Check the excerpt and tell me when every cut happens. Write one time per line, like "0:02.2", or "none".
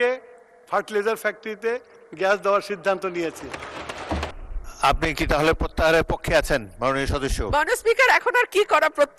0:04.3